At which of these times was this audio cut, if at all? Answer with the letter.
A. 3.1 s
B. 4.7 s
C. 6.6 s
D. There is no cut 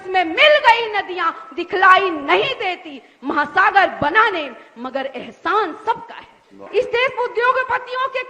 C